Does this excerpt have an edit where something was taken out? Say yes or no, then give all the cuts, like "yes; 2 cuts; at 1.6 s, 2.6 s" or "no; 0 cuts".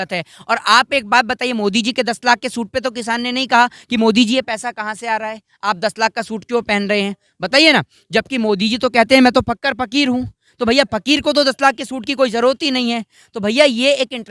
no; 0 cuts